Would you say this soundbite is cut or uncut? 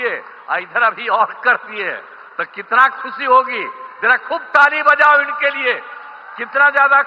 uncut